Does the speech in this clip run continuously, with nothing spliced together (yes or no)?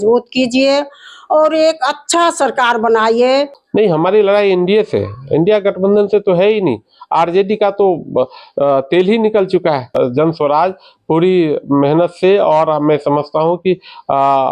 no